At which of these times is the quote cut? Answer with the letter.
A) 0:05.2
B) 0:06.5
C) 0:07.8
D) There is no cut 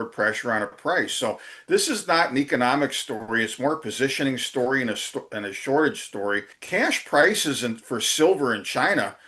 B